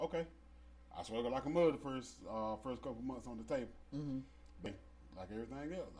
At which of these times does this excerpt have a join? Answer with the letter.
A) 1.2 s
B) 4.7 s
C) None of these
B